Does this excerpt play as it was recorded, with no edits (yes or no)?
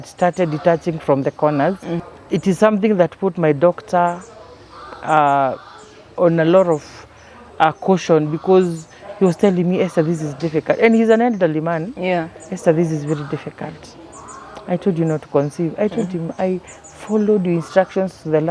no